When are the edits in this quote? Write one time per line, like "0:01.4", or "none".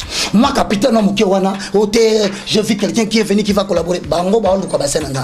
none